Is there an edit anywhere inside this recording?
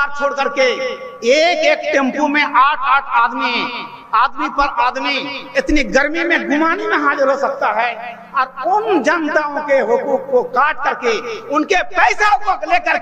no; 0 cuts

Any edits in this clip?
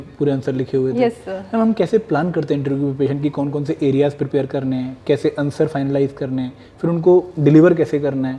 no; 0 cuts

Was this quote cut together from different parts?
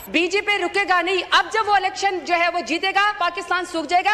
yes; 1 cut; at 3.2 s

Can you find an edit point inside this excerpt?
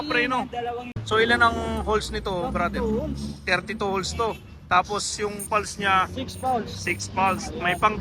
yes; 1 cut; at 1.0 s

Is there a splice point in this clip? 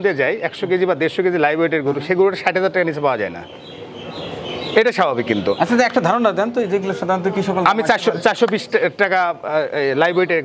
no; 0 cuts

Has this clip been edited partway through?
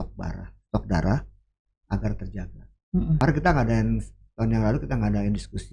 yes; 1 cut; at 3.2 s

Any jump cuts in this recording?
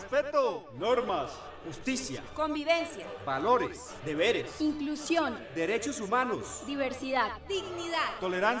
yes; 1 cut; at 6.6 s

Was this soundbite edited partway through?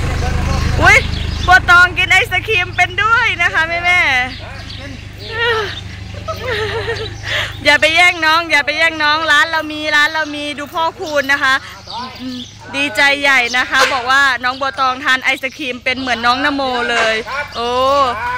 no; 0 cuts

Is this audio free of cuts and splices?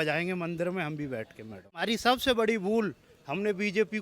no; 1 cut; at 1.8 s

